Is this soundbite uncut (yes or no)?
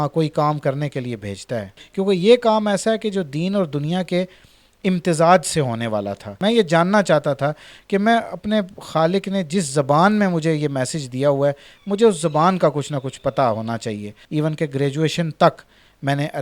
no